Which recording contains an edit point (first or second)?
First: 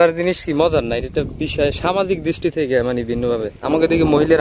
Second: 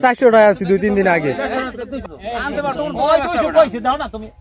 second